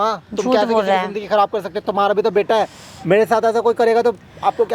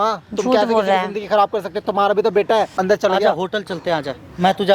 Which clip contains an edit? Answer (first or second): second